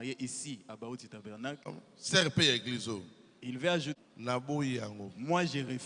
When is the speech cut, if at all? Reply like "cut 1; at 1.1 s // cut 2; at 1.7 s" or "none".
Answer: cut 1; at 1.7 s // cut 2; at 3.9 s